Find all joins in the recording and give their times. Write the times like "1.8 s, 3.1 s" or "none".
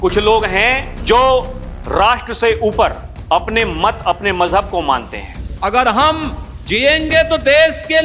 0.9 s, 5.6 s